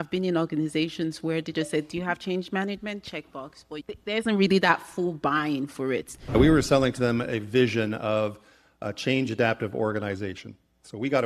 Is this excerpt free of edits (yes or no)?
no